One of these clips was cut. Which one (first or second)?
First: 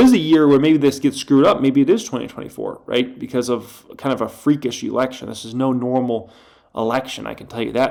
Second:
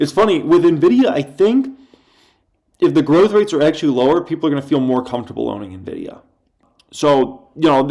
second